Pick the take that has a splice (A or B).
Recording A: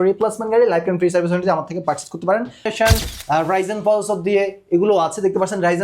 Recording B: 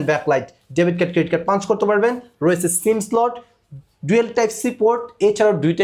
A